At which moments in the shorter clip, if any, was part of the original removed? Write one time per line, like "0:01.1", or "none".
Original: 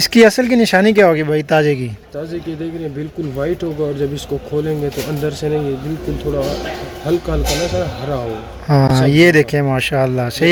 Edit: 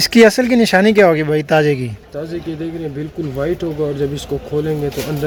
none